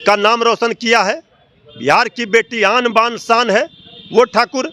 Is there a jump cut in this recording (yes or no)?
no